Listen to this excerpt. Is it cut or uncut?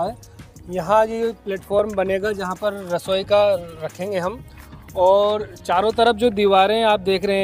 uncut